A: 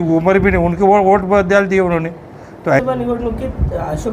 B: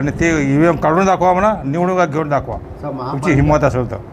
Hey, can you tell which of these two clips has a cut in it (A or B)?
A